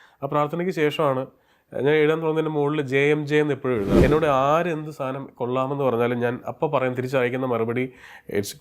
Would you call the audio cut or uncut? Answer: cut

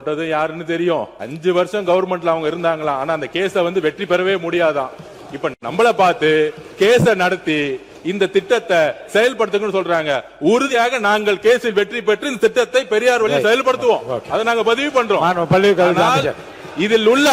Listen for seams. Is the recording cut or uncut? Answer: cut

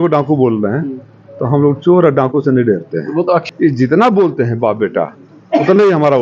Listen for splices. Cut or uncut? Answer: cut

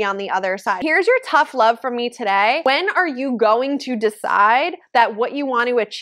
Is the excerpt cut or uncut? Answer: cut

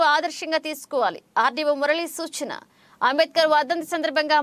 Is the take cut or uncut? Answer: uncut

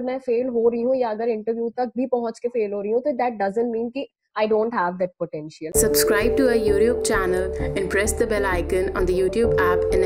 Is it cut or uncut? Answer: cut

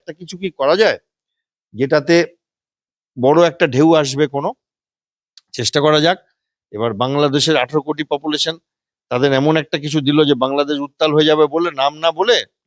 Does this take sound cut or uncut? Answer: uncut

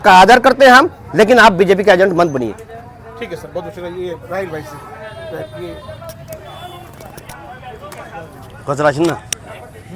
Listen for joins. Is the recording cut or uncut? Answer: uncut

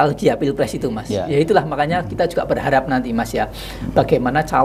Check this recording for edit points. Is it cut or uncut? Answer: cut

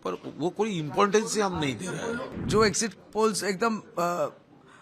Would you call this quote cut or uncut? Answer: cut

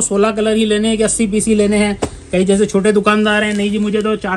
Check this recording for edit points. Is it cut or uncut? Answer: uncut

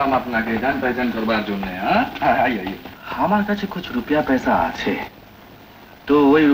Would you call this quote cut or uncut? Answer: cut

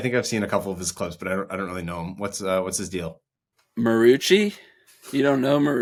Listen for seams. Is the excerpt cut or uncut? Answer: uncut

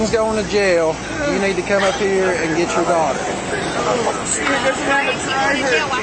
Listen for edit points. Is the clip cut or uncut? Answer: uncut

